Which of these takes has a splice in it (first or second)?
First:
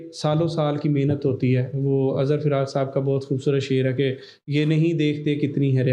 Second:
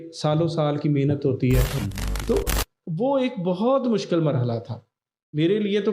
second